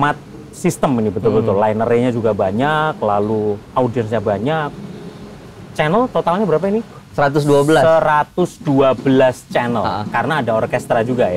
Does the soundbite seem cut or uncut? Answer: uncut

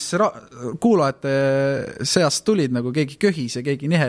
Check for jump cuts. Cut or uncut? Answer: uncut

